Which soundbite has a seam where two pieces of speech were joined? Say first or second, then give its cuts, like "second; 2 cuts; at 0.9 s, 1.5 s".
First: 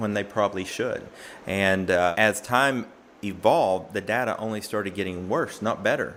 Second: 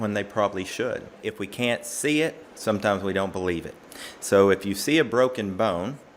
second; 1 cut; at 1.2 s